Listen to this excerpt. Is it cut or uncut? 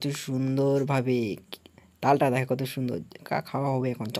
uncut